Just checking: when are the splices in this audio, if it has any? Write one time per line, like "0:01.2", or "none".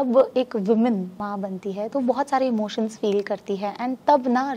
0:01.2